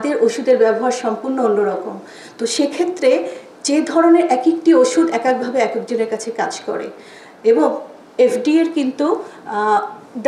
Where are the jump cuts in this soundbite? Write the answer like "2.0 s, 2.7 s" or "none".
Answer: none